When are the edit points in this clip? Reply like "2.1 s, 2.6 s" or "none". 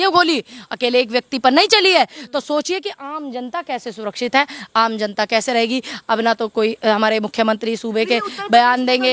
none